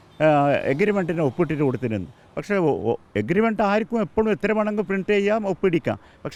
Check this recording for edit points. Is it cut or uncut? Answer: uncut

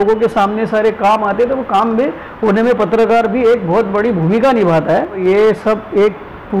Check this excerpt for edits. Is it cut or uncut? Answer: cut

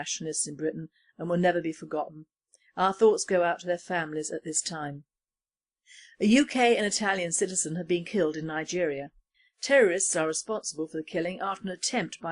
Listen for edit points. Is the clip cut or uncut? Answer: cut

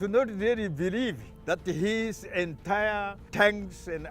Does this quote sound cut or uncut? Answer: cut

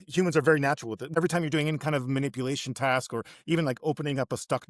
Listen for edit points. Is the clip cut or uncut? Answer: cut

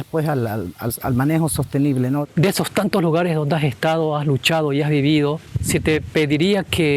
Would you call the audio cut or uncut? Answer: cut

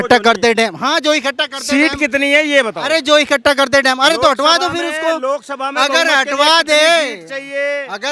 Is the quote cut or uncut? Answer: uncut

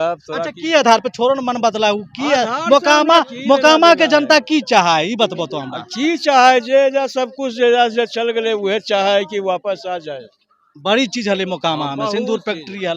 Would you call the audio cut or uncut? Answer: uncut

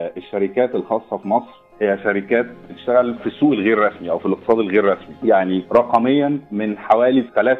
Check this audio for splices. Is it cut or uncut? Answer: cut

